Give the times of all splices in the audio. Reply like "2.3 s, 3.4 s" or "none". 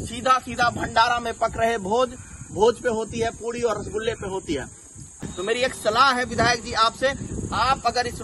5.2 s